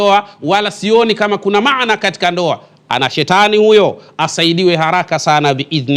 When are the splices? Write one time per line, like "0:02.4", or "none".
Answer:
none